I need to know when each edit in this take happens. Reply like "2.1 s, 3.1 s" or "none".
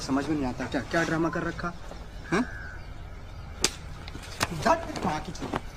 none